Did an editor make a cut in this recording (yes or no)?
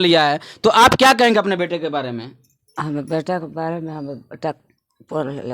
no